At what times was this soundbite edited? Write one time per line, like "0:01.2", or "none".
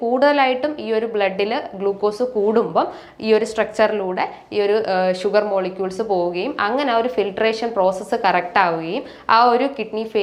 none

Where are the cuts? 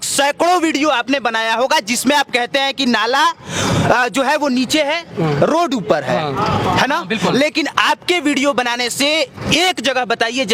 none

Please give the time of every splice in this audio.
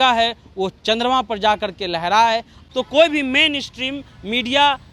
0:02.6

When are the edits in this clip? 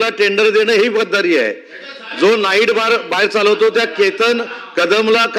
none

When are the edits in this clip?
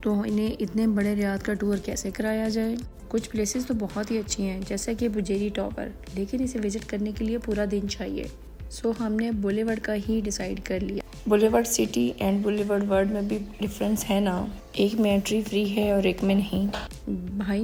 none

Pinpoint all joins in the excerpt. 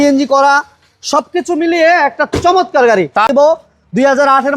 0:03.3

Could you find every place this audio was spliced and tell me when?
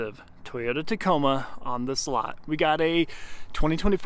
none

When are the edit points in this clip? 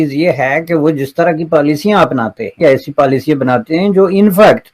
0:02.6

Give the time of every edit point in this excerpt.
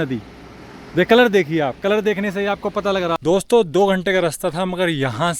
0:03.1

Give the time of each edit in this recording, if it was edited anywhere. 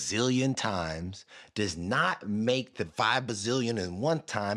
0:02.9

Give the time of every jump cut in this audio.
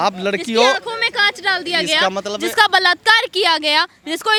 none

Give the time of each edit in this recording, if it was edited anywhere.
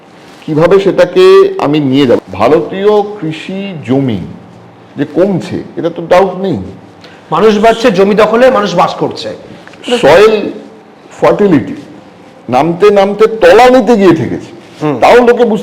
0:02.2

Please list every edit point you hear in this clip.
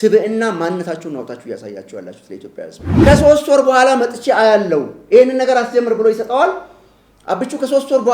0:03.1

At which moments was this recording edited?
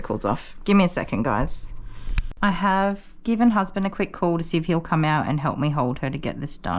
0:02.2

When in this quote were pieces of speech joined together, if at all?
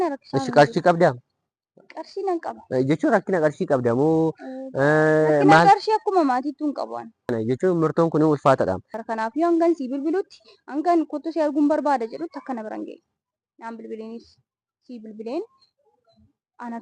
0:07.3
0:08.9

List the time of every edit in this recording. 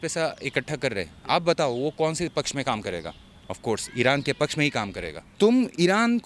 0:05.2

